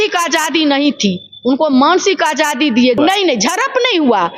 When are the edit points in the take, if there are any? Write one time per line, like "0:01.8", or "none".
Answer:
0:03.0